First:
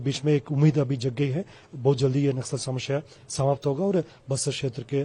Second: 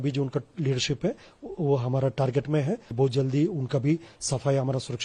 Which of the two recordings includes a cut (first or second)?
second